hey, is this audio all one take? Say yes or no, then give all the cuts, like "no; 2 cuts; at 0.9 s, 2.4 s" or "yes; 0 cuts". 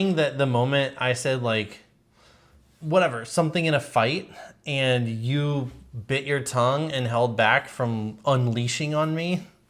yes; 0 cuts